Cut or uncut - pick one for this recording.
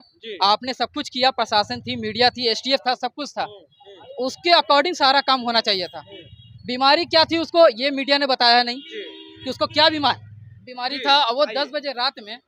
uncut